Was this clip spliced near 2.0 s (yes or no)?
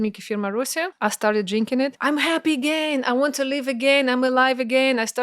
yes